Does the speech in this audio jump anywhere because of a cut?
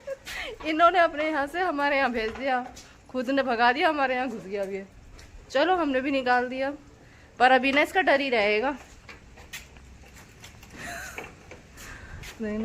no; 0 cuts

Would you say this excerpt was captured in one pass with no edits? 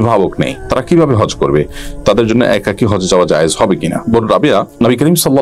yes; 0 cuts

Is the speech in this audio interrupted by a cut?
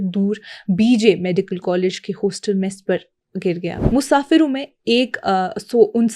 yes; 1 cut; at 3.7 s

